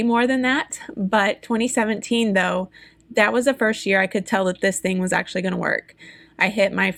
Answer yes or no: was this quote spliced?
no